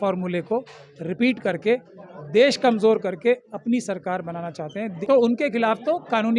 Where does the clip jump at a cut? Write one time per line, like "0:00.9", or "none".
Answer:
0:04.9